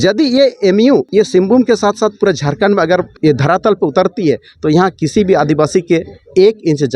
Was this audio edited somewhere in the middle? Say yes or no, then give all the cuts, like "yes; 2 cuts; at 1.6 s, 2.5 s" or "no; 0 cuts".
yes; 2 cuts; at 1.1 s, 3.1 s